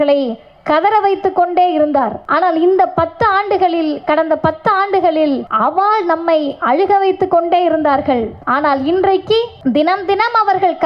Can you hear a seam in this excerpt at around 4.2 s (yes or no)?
no